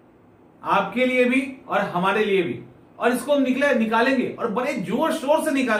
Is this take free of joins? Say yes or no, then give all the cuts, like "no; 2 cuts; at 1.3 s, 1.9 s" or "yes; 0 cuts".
yes; 0 cuts